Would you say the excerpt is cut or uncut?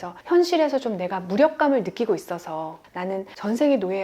cut